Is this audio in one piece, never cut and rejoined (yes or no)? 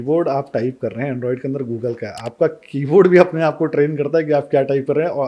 yes